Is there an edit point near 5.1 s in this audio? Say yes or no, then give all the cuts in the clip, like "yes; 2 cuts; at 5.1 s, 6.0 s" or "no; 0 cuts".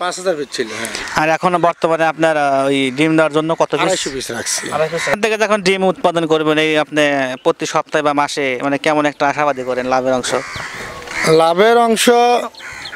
yes; 1 cut; at 5.1 s